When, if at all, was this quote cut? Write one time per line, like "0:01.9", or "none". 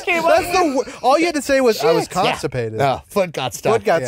0:01.8